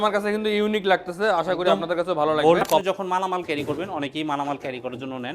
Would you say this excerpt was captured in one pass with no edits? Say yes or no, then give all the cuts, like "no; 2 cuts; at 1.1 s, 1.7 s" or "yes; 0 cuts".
no; 1 cut; at 2.8 s